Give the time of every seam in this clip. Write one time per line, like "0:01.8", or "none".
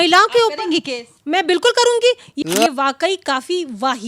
0:02.3